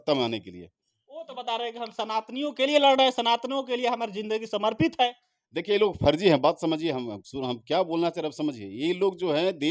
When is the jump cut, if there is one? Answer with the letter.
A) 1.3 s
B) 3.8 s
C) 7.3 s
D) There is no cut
A